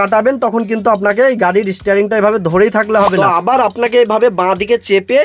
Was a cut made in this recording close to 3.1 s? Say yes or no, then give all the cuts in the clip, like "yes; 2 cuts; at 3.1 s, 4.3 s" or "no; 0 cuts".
yes; 1 cut; at 3.1 s